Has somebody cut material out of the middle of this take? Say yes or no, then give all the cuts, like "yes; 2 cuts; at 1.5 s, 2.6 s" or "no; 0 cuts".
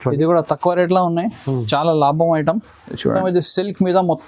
yes; 1 cut; at 3.1 s